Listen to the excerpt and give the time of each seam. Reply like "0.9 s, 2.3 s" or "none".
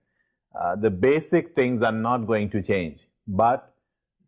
1.5 s